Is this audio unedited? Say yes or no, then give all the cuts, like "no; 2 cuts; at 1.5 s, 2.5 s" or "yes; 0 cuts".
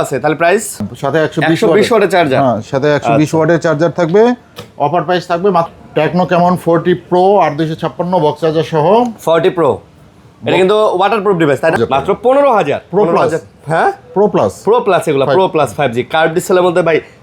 no; 3 cuts; at 0.9 s, 5.7 s, 11.8 s